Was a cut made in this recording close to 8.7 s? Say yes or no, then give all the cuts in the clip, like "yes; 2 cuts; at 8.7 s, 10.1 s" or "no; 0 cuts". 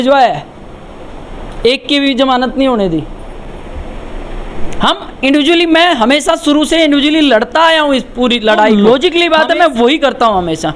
yes; 1 cut; at 8.7 s